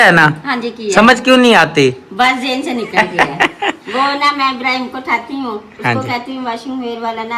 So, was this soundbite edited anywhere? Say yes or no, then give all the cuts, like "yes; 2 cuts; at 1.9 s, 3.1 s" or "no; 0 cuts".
no; 0 cuts